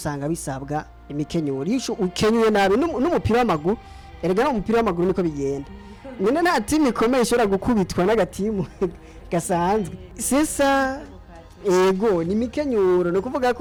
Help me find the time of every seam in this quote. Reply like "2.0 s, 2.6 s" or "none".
none